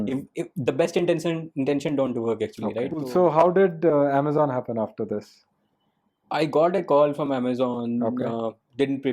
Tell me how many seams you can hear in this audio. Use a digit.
1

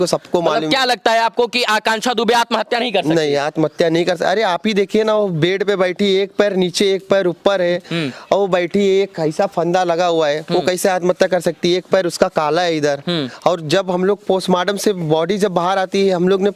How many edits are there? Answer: 0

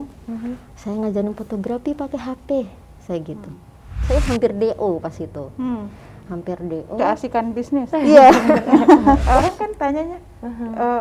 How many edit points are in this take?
2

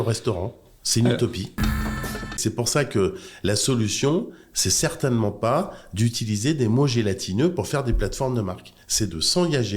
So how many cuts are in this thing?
1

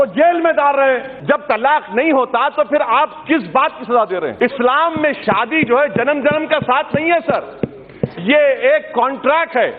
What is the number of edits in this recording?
2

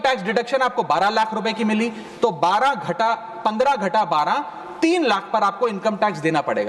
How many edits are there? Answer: 0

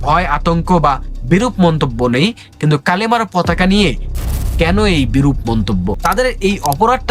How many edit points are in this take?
1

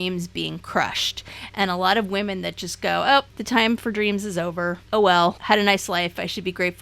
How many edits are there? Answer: 3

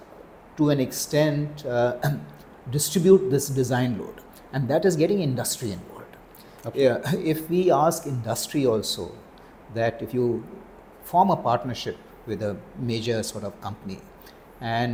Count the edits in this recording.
0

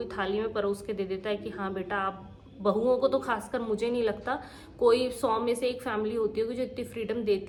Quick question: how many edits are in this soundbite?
0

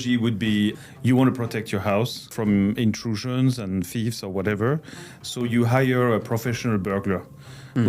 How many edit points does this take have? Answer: 2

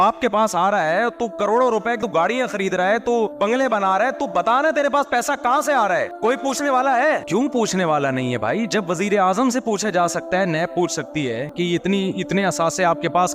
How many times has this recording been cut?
1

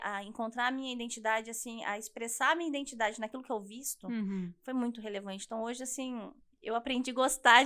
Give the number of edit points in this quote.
0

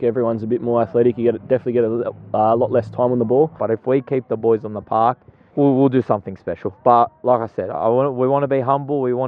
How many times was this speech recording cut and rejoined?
2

